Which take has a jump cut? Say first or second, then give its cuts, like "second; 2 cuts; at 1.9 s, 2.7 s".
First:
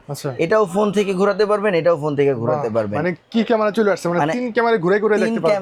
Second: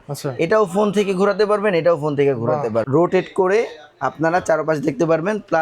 second; 1 cut; at 2.9 s